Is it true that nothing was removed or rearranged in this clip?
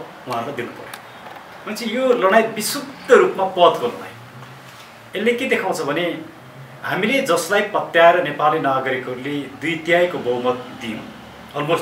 yes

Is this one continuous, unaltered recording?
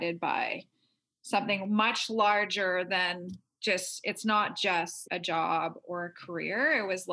no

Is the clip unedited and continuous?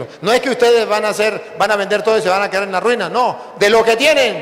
yes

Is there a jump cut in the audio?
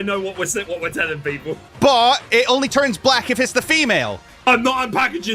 yes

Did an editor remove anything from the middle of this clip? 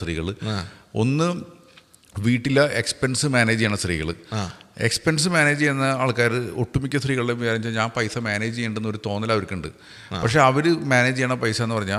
no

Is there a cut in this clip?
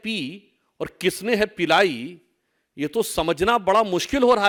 no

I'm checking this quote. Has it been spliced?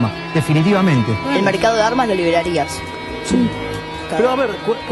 no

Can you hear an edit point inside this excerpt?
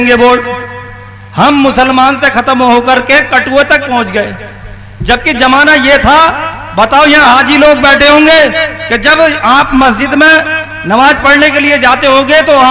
no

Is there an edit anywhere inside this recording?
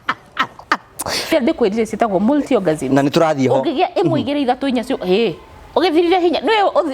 yes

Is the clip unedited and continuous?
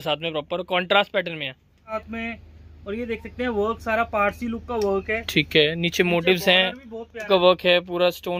no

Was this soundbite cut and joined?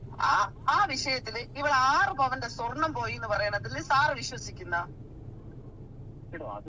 no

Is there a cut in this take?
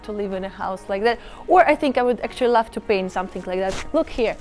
no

